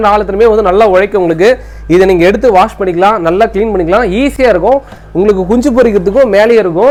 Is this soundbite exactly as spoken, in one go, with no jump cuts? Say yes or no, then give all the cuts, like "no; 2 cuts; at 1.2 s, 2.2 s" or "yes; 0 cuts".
yes; 0 cuts